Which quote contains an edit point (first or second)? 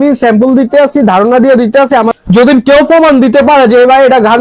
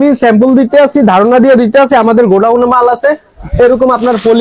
first